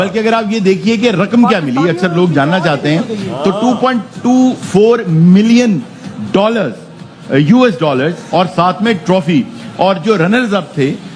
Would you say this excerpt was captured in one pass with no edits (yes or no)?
yes